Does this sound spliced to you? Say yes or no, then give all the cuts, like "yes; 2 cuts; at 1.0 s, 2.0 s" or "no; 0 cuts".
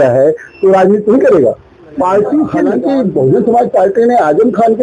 yes; 1 cut; at 2.7 s